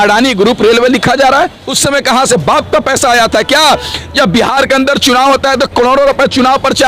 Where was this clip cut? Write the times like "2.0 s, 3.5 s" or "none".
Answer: 1.6 s